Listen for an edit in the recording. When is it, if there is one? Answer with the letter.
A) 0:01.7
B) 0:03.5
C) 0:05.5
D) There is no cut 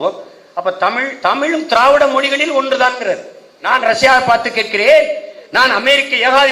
B